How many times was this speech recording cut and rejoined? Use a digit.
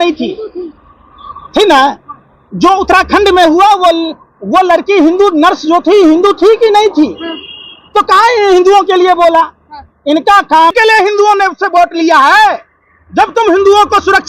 1